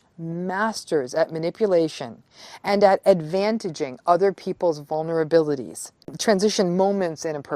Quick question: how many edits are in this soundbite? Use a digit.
1